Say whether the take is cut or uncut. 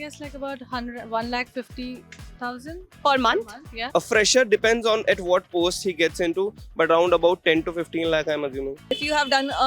cut